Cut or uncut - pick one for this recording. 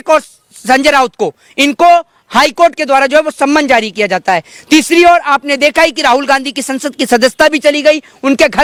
uncut